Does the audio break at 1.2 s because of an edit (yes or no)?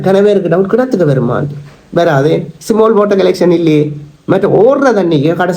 no